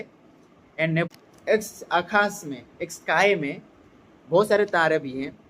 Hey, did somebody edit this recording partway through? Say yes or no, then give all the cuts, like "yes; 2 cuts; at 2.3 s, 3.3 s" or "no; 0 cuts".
yes; 1 cut; at 1.0 s